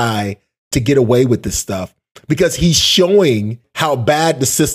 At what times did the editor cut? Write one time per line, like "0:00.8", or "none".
0:03.7